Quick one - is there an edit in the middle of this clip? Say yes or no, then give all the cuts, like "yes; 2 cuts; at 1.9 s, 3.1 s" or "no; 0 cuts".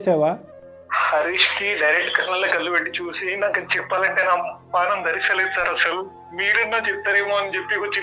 no; 0 cuts